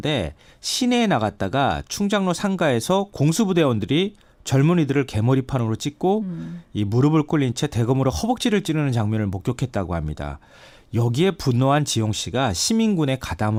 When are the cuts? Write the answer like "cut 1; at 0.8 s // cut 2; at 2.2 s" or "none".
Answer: none